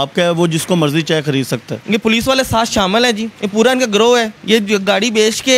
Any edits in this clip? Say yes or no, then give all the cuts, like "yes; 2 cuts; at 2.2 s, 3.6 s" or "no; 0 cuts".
yes; 3 cuts; at 1.7 s, 3.3 s, 4.4 s